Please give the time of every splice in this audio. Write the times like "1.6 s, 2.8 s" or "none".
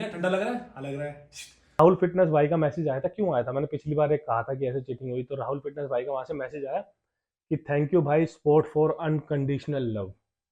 1.8 s